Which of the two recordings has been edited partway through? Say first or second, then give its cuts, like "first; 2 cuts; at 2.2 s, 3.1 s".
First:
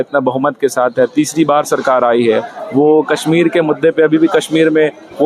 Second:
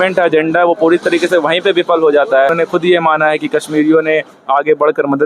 second; 1 cut; at 2.5 s